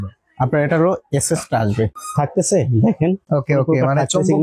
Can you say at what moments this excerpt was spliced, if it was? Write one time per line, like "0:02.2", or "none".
0:02.0
0:03.2